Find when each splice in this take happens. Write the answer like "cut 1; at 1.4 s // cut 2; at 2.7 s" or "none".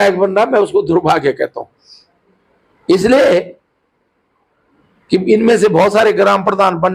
none